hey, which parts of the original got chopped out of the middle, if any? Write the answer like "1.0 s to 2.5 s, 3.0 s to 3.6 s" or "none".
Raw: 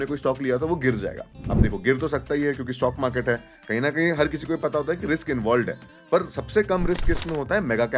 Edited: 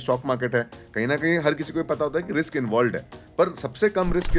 none